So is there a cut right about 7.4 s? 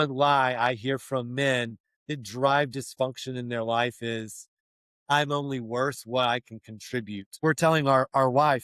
yes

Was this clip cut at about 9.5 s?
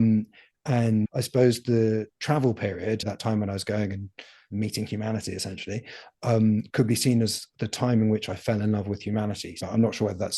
yes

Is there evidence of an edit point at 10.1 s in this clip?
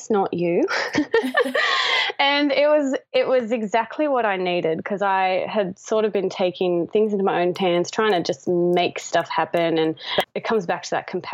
yes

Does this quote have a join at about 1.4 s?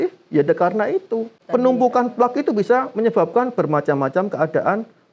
yes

